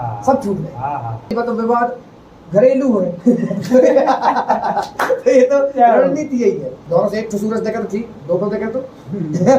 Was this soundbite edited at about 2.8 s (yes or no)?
no